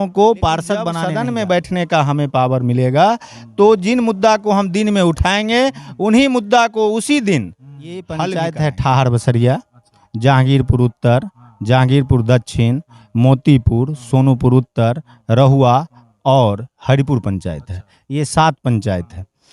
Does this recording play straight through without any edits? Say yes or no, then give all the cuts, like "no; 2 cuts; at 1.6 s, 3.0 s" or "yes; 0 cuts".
no; 2 cuts; at 0.9 s, 8.3 s